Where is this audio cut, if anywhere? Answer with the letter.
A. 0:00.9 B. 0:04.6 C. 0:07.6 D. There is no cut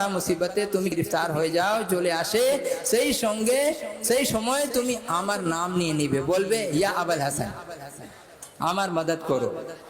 A